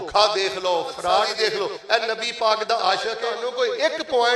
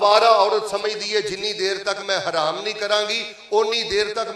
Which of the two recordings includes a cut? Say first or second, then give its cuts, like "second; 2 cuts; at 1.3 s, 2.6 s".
first; 2 cuts; at 1.3 s, 3.4 s